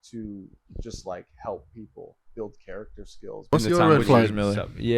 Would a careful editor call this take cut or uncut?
cut